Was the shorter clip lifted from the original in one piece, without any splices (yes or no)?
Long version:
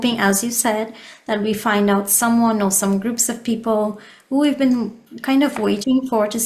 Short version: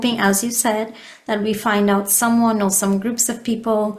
yes